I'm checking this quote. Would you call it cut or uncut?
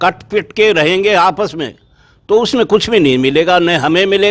uncut